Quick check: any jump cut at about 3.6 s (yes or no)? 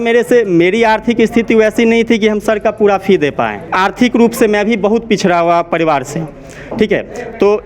yes